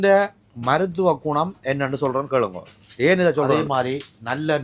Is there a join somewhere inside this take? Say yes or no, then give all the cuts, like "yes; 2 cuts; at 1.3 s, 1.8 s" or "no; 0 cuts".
yes; 1 cut; at 3.5 s